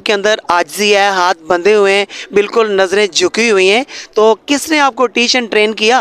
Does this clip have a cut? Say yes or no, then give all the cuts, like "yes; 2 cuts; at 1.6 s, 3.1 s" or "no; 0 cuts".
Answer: no; 0 cuts